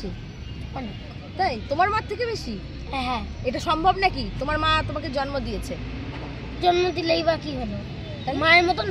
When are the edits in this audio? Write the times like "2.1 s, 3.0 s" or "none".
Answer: none